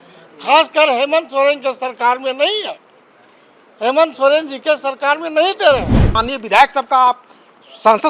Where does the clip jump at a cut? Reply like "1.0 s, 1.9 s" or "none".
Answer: 6.1 s